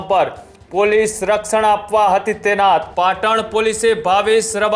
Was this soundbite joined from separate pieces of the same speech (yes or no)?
yes